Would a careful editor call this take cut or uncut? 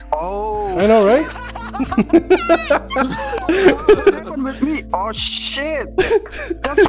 uncut